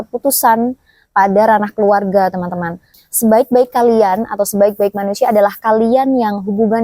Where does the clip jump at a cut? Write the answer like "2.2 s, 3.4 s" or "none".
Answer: 2.9 s